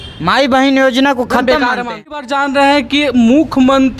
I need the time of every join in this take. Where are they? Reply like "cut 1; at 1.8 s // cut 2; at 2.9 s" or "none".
cut 1; at 2.1 s